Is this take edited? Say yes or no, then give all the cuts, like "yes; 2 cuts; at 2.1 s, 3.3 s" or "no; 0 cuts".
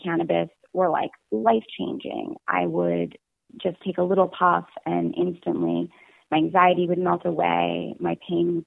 no; 0 cuts